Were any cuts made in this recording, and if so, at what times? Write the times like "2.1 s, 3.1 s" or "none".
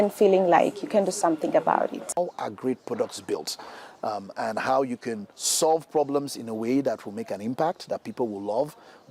2.1 s